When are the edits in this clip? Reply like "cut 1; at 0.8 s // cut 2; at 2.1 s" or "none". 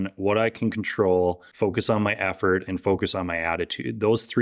none